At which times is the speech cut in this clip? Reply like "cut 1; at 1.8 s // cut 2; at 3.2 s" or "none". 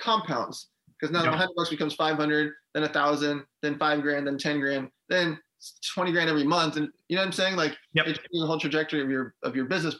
none